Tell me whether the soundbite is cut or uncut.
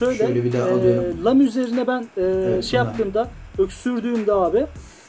uncut